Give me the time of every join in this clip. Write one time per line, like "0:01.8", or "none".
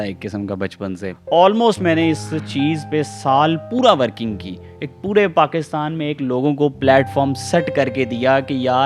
0:01.1